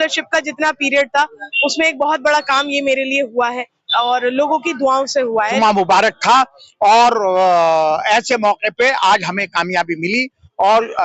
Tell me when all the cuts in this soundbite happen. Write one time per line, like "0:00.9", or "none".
0:05.5